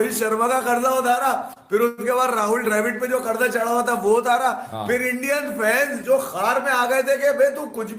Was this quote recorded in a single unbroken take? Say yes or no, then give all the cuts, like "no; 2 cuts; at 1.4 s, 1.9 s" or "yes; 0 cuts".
yes; 0 cuts